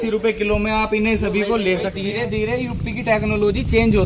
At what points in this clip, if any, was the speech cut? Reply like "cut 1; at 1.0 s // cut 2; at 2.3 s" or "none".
cut 1; at 2.0 s